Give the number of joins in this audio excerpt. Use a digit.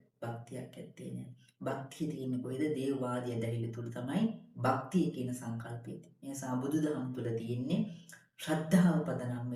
0